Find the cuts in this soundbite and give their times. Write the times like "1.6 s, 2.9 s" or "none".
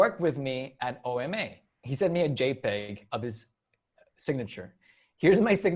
1.8 s